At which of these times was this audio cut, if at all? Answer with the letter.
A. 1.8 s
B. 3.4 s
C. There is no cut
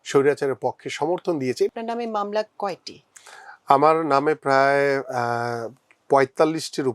A